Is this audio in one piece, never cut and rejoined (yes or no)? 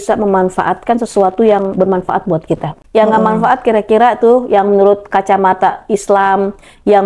no